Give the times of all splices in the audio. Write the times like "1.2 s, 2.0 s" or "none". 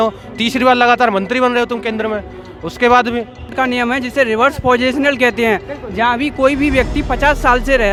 none